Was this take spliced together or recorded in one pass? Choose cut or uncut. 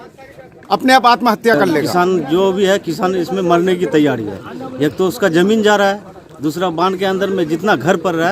cut